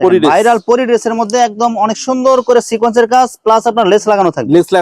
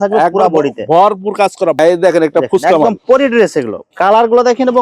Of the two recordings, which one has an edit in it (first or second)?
second